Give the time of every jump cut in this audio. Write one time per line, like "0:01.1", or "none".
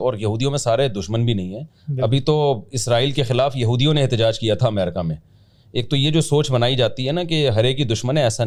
none